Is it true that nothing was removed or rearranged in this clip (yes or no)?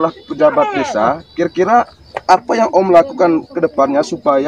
yes